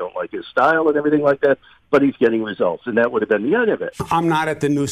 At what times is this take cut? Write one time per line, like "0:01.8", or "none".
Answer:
0:03.9